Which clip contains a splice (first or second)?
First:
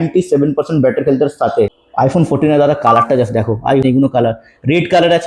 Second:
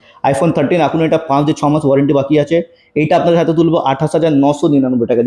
first